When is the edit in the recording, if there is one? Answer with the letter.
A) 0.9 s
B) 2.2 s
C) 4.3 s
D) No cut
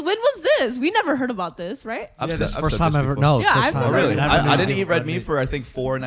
D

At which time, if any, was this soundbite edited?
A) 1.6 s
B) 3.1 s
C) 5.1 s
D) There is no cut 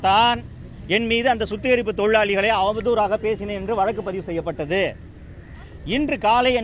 D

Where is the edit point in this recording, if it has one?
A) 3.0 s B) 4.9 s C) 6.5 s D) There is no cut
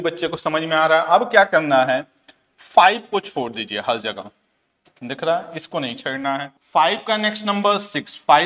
C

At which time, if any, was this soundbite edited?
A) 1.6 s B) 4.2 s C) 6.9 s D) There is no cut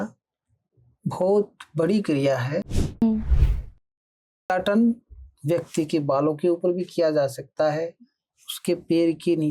D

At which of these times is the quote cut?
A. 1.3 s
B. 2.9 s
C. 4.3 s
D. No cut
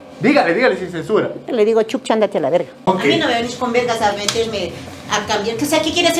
B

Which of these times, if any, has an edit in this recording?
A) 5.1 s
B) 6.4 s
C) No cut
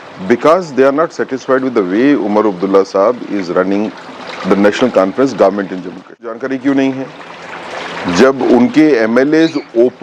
B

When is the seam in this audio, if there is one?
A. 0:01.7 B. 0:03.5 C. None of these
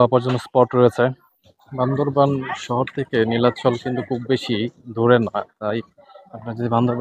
A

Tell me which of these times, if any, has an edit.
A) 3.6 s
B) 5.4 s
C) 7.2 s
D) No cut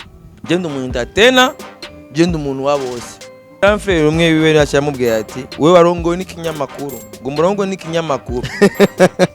A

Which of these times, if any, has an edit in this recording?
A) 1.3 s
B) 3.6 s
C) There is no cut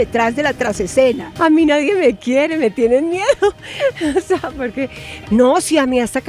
A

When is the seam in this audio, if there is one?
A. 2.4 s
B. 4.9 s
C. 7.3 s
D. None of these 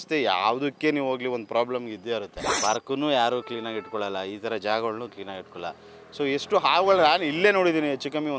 A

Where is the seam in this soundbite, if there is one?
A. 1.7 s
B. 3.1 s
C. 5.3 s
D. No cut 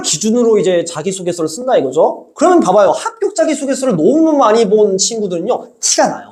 D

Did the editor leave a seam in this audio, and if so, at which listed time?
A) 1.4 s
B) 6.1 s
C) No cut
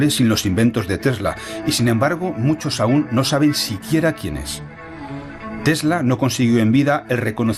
A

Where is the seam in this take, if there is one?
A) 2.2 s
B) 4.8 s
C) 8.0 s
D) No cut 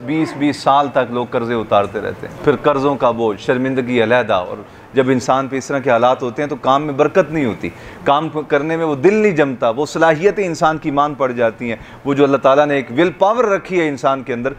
A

